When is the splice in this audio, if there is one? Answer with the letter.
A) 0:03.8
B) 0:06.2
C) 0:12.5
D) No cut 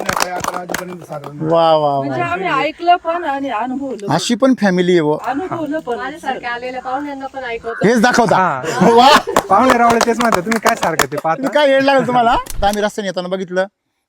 C